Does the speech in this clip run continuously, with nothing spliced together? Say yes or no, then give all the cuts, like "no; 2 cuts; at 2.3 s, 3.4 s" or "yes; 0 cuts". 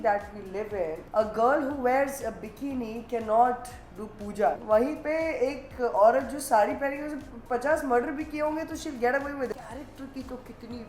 no; 3 cuts; at 1.0 s, 4.6 s, 9.5 s